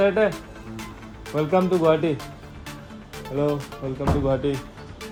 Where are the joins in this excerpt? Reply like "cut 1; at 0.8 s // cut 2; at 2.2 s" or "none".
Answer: none